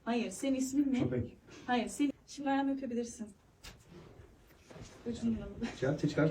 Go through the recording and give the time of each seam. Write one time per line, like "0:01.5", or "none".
0:02.1